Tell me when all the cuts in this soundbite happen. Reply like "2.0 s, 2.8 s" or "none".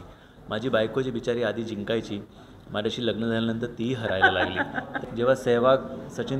5.0 s